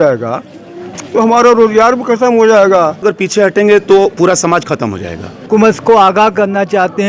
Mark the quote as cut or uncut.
cut